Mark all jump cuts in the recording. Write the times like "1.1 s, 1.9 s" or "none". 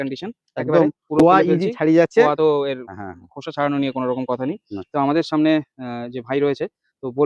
none